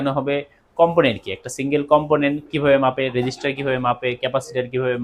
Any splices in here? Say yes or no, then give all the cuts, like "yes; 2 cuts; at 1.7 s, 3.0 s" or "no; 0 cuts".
no; 0 cuts